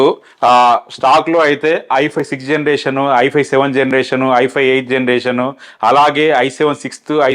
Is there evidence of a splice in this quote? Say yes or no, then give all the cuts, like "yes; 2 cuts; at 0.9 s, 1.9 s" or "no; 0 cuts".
no; 0 cuts